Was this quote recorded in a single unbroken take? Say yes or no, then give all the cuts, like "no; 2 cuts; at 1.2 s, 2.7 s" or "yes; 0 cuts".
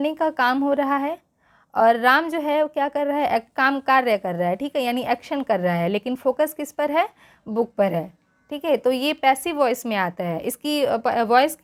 yes; 0 cuts